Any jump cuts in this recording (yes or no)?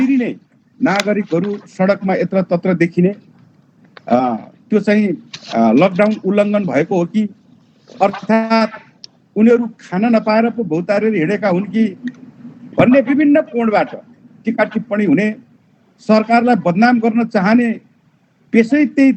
no